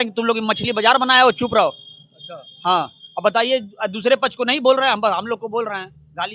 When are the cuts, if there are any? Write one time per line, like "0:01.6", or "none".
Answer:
none